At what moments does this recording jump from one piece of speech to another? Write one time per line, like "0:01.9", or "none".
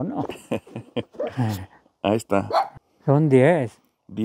0:02.8